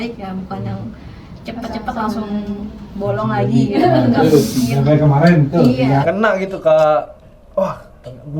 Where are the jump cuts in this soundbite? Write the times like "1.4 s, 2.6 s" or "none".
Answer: 6.0 s